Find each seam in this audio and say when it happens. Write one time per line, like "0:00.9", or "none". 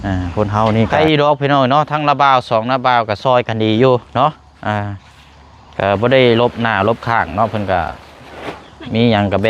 0:00.9